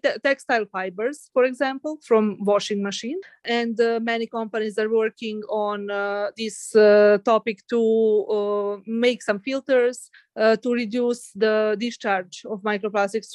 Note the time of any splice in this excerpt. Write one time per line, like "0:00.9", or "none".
none